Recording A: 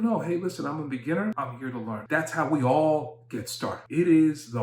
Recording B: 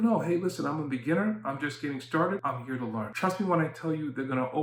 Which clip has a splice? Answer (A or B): A